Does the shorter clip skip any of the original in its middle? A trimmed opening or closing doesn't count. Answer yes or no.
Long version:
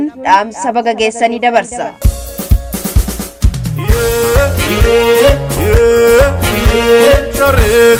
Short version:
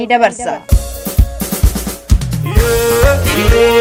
no